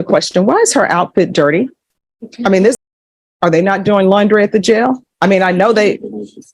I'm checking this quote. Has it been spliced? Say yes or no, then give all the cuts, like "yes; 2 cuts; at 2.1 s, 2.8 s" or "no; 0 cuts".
yes; 2 cuts; at 2.8 s, 5.1 s